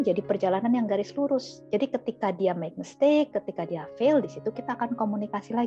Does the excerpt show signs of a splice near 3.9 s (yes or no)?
no